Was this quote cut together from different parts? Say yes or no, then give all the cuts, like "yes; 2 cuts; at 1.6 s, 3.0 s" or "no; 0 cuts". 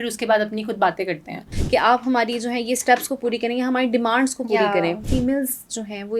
yes; 2 cuts; at 1.5 s, 5.0 s